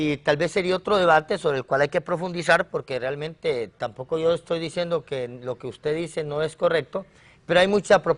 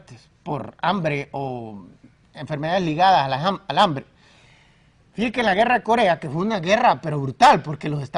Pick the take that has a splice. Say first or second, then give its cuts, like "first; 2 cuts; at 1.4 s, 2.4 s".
second; 1 cut; at 2.2 s